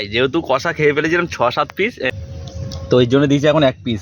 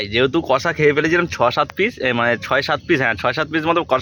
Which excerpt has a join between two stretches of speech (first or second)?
first